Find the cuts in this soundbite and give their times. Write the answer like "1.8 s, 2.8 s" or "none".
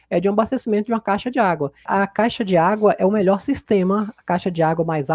1.9 s